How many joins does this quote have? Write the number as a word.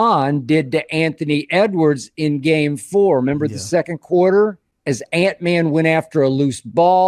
zero